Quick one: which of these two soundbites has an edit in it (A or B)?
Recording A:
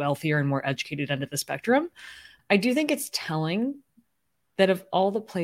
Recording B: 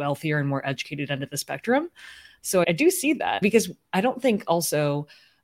A